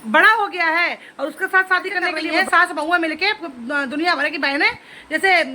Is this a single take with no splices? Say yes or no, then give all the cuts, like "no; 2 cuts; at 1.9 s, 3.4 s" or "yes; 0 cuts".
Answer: no; 1 cut; at 2.2 s